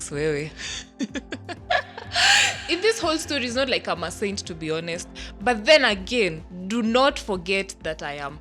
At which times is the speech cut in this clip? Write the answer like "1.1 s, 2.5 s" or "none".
2.5 s